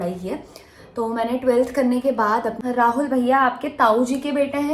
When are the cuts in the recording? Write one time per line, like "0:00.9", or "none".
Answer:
0:02.6